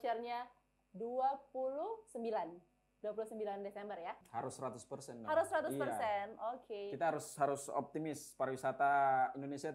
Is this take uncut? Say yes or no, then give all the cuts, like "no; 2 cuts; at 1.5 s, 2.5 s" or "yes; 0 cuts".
no; 1 cut; at 4.2 s